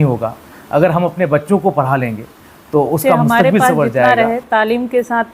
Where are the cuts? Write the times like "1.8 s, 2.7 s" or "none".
4.1 s